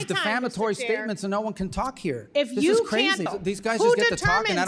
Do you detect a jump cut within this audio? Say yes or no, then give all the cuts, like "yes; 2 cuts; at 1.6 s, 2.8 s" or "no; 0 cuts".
yes; 1 cut; at 3.3 s